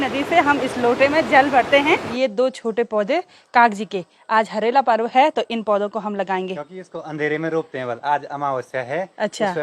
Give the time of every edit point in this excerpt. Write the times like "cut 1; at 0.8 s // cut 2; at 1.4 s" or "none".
cut 1; at 2.1 s // cut 2; at 6.6 s